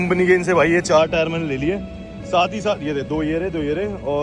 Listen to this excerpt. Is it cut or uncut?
uncut